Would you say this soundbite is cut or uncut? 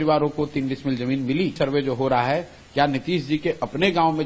cut